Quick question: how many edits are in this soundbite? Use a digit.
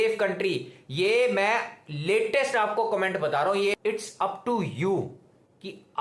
1